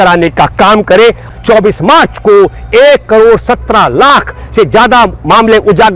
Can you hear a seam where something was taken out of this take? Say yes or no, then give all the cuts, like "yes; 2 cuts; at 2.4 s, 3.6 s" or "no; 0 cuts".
no; 0 cuts